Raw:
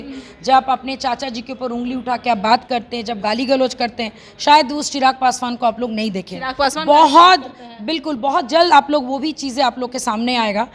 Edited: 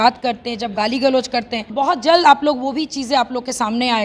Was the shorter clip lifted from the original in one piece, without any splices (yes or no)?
no